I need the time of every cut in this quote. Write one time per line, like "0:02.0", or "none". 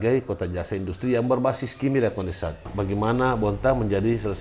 0:02.7